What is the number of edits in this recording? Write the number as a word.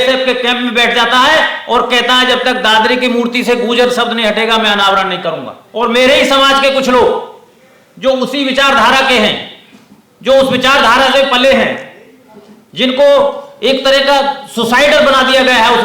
one